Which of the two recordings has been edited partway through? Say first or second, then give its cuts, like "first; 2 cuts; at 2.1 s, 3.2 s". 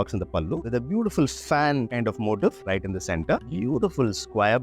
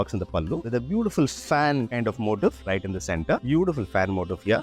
first; 1 cut; at 3.4 s